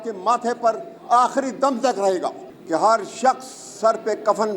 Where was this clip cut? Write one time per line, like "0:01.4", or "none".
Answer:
0:02.5

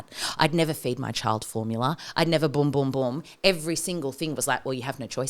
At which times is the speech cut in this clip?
none

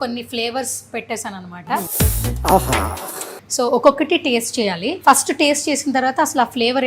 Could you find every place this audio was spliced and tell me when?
0:01.9
0:03.4
0:04.9

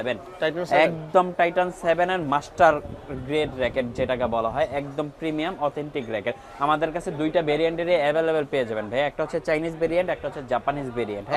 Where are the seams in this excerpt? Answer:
none

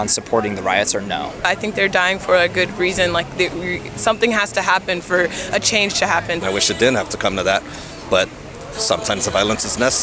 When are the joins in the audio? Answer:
0:01.5
0:06.4

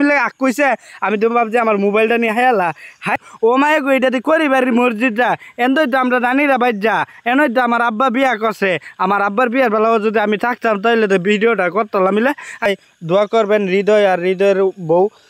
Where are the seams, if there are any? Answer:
0:03.1
0:12.7

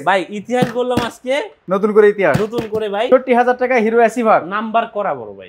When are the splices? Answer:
0:01.6
0:03.1

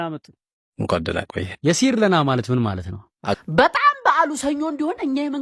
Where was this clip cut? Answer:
0:03.4

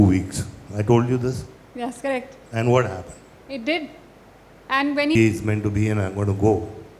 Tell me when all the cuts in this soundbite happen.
0:05.2

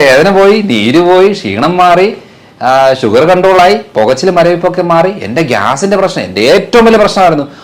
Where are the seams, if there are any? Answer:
none

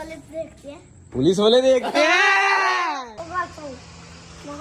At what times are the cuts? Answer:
0:03.1

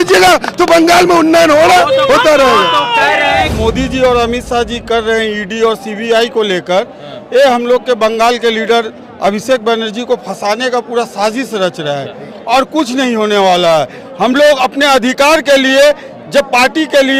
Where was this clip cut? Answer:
0:03.6

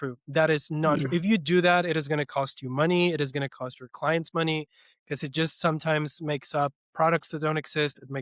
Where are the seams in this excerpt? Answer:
none

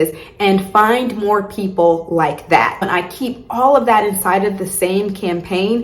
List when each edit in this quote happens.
0:02.9

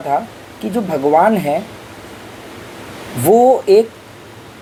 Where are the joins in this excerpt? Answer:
none

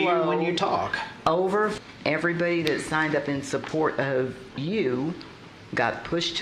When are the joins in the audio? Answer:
0:01.8

